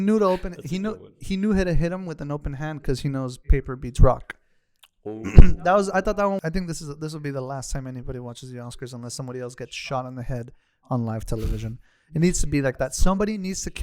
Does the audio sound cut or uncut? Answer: cut